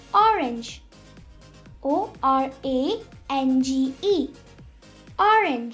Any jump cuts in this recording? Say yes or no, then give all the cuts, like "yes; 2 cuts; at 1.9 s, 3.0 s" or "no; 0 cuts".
no; 0 cuts